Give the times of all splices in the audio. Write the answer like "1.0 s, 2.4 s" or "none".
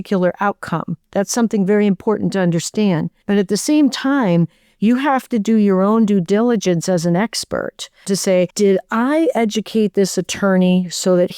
3.1 s, 8.2 s